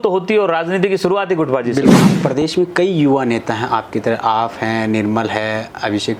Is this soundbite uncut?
no; 1 cut; at 2.1 s

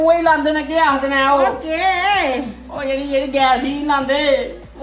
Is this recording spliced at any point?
no; 0 cuts

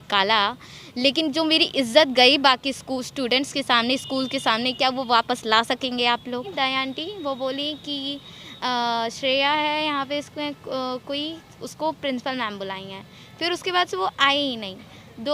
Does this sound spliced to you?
yes; 1 cut; at 6.5 s

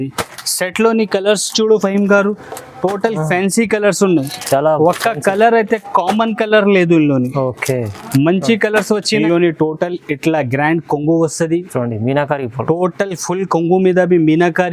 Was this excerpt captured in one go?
no; 1 cut; at 9.2 s

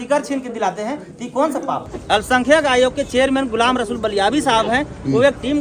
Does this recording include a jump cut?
yes; 1 cut; at 1.8 s

